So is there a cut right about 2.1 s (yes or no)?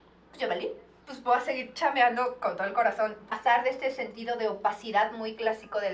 no